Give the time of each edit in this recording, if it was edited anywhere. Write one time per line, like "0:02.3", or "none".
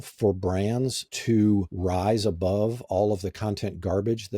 0:01.1
0:01.7